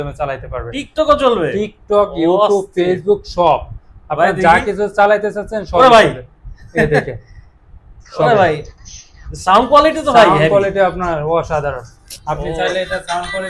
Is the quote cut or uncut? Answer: uncut